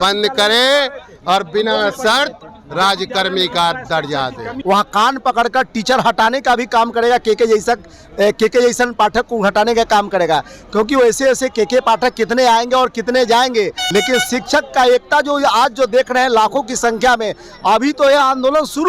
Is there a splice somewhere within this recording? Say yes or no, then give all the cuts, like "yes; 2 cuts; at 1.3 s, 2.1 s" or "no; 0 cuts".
yes; 2 cuts; at 4.5 s, 13.8 s